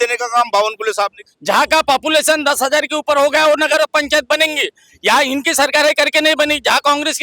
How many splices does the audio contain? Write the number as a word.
one